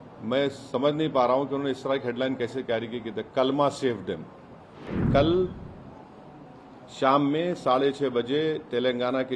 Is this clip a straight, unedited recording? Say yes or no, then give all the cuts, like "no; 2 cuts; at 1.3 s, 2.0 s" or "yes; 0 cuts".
no; 1 cut; at 5.0 s